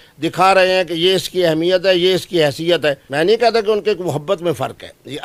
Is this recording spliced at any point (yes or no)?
no